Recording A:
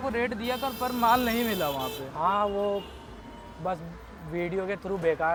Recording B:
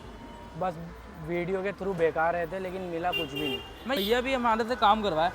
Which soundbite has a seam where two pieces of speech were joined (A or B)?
B